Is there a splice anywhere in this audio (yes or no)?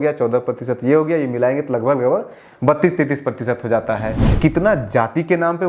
yes